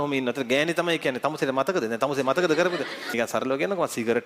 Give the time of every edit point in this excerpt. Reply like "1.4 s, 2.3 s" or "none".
3.1 s

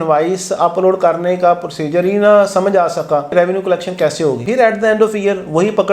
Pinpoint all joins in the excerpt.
3.3 s, 4.4 s

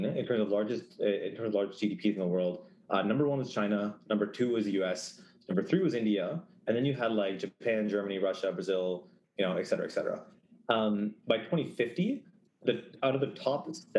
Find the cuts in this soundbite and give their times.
none

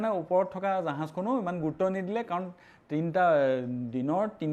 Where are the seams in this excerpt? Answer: none

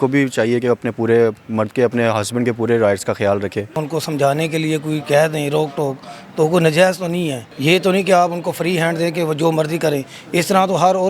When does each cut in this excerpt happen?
3.8 s, 7.5 s

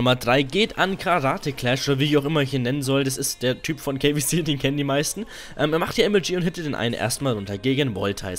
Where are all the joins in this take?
1.1 s

